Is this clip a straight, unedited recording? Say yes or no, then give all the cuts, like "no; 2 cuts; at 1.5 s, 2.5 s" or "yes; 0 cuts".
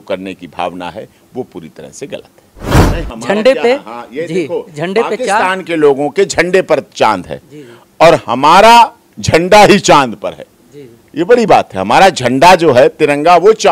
no; 1 cut; at 2.8 s